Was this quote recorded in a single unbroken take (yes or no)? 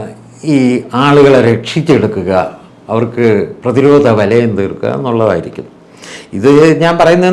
yes